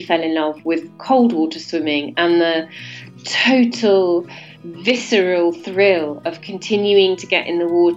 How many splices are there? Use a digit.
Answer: 0